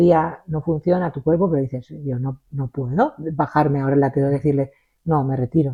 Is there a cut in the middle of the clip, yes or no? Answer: no